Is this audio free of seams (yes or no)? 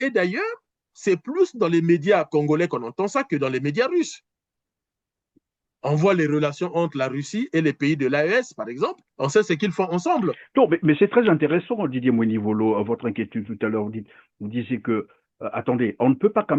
yes